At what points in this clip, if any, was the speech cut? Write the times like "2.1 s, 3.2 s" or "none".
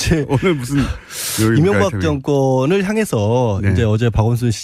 1.2 s